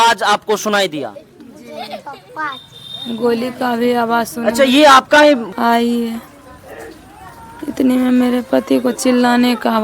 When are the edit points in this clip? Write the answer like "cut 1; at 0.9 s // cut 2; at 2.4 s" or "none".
cut 1; at 5.5 s